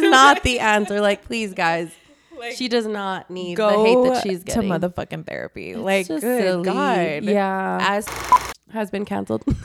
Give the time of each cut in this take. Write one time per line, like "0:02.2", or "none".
0:08.1